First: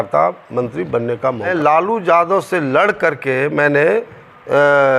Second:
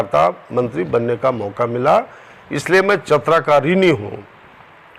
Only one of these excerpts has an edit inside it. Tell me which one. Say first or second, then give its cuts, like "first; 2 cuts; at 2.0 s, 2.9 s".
first; 1 cut; at 1.5 s